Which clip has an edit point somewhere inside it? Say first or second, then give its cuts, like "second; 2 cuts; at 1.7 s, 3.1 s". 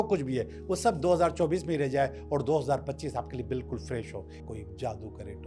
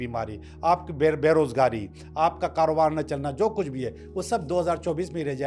first; 1 cut; at 4.4 s